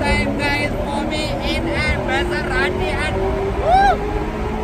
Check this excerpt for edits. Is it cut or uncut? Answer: uncut